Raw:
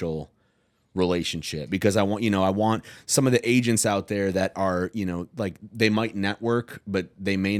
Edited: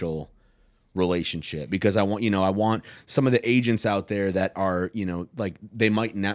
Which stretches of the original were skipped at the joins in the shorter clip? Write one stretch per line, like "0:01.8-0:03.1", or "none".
none